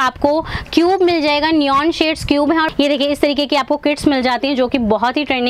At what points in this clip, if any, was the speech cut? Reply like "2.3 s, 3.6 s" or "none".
2.7 s